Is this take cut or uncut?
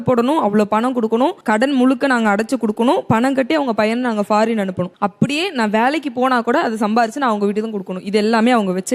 uncut